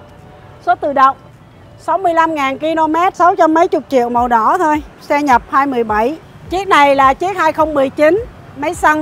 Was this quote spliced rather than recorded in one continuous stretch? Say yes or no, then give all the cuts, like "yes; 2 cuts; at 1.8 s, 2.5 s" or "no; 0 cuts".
yes; 2 cuts; at 3.1 s, 6.3 s